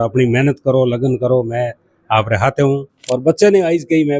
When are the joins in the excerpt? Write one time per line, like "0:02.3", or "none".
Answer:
0:02.9